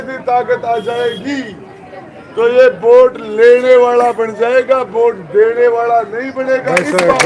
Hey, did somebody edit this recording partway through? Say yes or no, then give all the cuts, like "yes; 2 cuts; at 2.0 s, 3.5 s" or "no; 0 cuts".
no; 0 cuts